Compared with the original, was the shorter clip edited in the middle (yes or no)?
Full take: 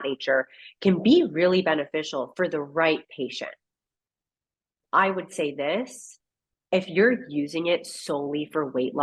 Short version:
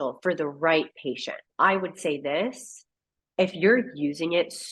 yes